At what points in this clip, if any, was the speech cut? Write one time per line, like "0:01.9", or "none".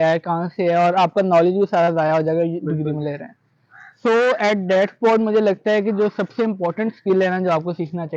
none